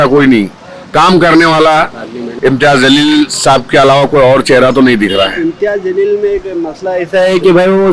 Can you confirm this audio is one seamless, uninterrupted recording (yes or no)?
no